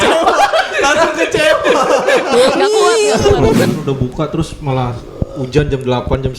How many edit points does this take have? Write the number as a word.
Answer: one